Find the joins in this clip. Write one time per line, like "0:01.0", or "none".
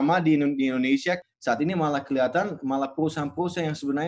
0:01.2

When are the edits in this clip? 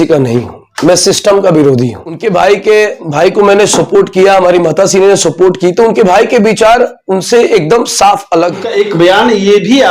0:02.2
0:08.7

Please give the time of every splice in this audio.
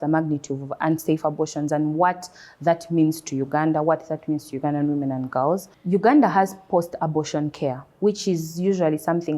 0:05.7

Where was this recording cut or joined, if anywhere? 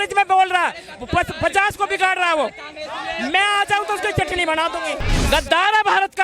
0:05.1

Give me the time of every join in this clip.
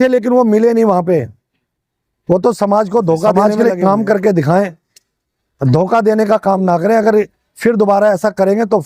0:03.4

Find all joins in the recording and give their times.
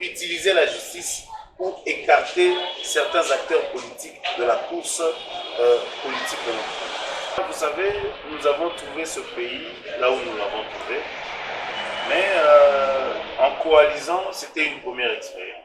0:07.4

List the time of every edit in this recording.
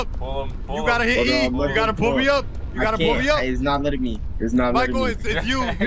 none

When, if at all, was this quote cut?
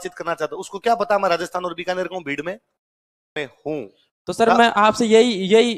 0:03.4

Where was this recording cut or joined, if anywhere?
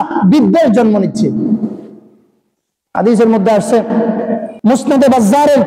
none

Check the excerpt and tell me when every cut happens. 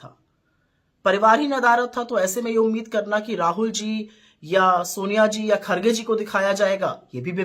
none

